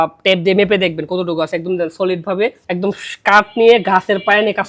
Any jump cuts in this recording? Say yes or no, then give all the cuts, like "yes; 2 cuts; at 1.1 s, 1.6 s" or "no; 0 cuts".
yes; 1 cut; at 2.6 s